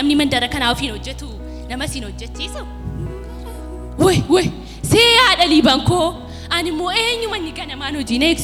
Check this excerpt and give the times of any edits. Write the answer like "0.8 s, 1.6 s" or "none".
none